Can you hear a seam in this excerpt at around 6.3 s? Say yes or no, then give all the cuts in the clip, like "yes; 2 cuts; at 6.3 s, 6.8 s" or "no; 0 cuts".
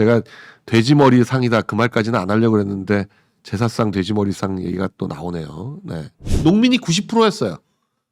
yes; 1 cut; at 6.3 s